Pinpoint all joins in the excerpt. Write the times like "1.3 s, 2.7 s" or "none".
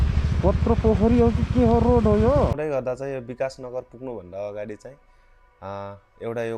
2.6 s